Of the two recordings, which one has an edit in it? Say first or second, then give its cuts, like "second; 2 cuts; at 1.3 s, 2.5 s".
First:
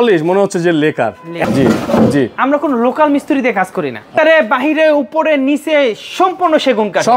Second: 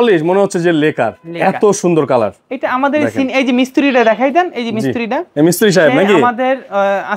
first; 2 cuts; at 1.3 s, 4.1 s